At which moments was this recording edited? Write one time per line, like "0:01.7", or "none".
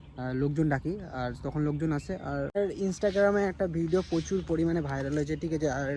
0:02.6